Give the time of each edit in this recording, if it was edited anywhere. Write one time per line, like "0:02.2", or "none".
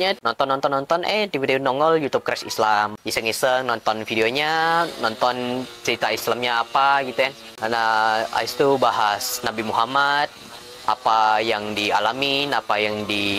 none

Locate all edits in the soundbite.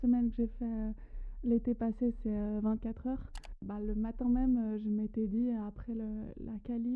0:03.7

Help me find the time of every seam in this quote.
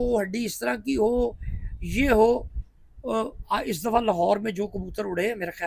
none

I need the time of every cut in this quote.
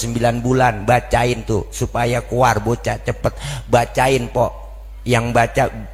none

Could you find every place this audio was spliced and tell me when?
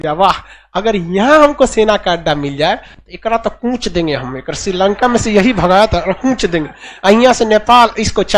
none

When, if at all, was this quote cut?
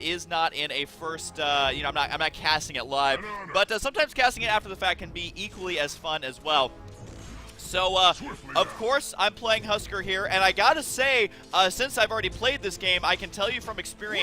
0:09.1

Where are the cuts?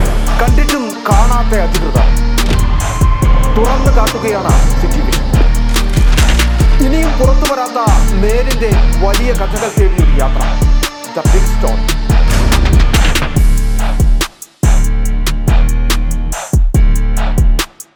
none

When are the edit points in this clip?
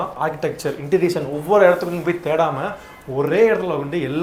none

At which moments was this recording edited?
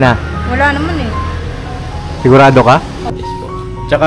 0:03.0

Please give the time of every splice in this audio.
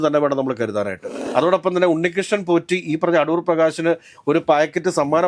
0:01.1

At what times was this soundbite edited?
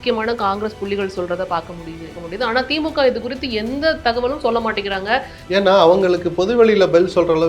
0:02.2
0:05.4

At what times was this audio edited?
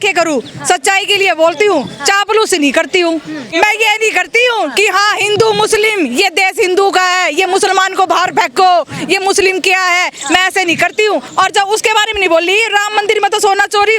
0:03.5
0:11.3

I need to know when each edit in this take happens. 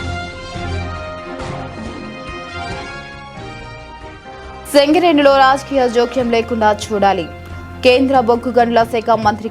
0:04.6

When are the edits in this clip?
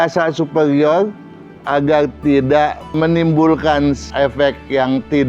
0:03.0
0:04.1

